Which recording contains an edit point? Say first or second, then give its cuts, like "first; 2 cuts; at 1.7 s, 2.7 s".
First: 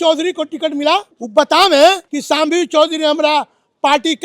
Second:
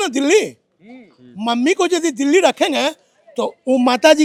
first; 2 cuts; at 1.1 s, 2.1 s